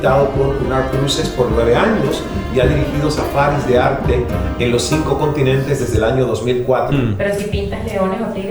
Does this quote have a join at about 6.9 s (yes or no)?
yes